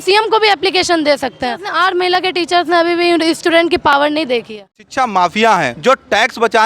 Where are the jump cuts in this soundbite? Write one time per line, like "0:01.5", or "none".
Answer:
0:01.6
0:04.8
0:05.7